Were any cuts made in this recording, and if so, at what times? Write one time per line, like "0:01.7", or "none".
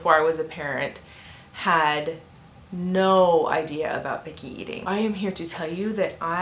0:04.8